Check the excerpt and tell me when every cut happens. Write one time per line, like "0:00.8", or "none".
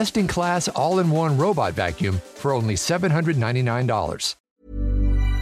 0:04.3